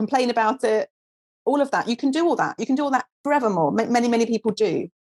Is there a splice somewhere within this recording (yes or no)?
no